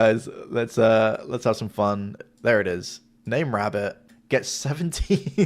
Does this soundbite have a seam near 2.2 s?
yes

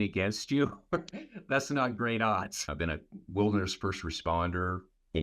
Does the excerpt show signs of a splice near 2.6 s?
yes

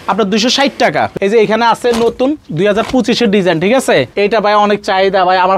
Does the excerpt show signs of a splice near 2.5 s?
no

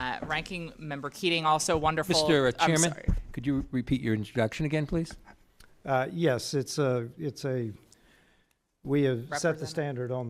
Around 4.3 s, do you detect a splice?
yes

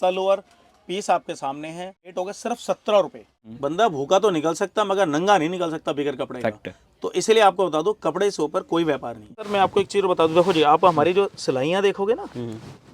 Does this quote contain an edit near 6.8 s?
no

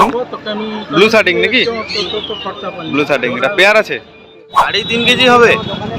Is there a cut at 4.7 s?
yes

